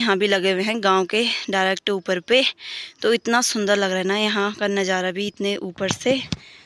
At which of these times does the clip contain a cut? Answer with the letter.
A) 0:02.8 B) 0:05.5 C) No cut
C